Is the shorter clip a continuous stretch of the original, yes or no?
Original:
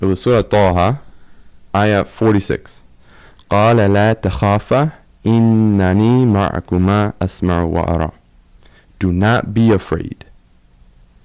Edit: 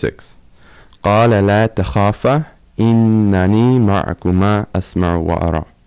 yes